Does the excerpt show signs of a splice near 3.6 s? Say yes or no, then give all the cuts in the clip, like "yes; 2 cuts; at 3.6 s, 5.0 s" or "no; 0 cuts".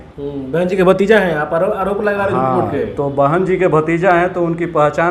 no; 0 cuts